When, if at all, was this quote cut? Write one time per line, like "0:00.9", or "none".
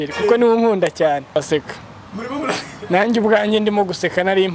0:01.4